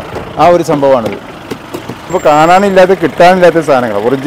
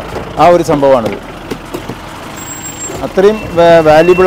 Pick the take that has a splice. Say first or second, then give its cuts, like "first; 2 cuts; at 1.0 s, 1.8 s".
first; 1 cut; at 2.1 s